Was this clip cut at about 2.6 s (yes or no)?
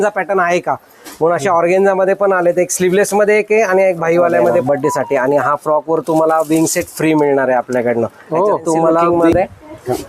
no